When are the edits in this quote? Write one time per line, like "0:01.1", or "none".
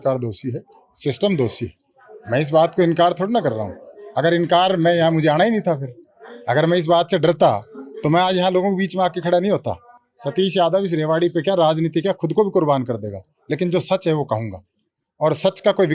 none